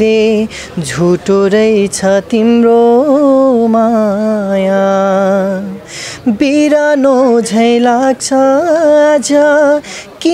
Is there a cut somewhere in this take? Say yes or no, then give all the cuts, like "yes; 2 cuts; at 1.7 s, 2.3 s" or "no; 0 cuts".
no; 0 cuts